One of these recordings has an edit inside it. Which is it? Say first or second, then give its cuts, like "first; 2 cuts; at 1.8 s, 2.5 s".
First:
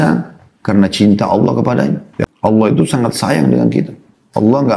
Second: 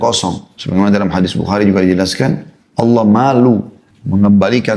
first; 1 cut; at 2.1 s